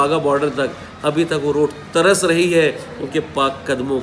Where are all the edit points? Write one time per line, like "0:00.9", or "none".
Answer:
none